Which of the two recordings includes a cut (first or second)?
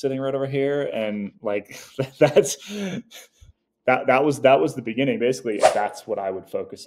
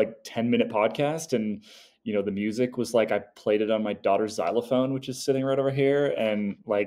first